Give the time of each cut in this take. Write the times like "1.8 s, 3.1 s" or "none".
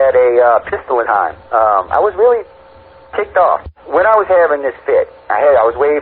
1.1 s